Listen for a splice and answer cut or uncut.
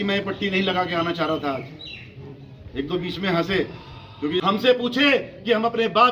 cut